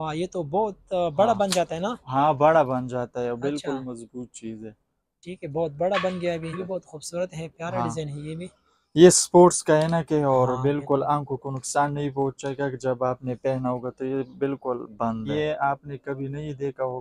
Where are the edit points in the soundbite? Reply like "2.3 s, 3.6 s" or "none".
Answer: 6.6 s, 15.3 s

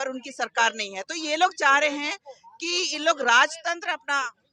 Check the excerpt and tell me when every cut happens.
none

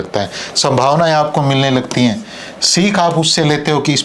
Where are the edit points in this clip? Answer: none

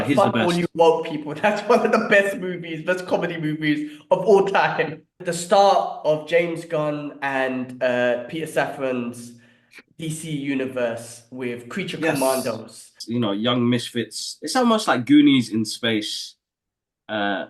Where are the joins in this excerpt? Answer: 5.2 s, 13.0 s

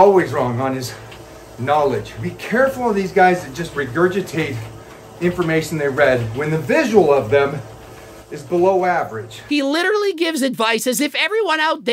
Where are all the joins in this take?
2.2 s, 3.6 s, 6.3 s, 9.4 s

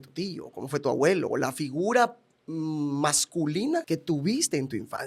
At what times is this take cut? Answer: 3.8 s

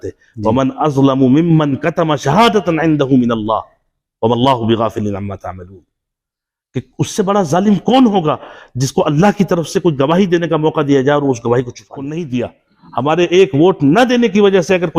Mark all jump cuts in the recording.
12.1 s

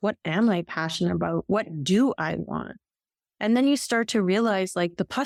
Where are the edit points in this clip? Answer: none

